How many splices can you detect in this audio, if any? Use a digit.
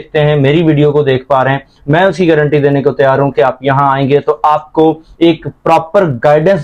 0